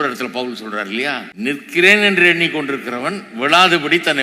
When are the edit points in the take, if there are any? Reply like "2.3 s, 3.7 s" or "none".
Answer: 1.3 s